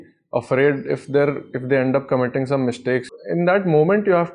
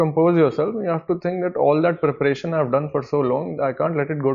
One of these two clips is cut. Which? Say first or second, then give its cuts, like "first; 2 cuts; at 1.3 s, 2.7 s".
first; 1 cut; at 3.1 s